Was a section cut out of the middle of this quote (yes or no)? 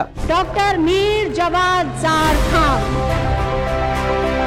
no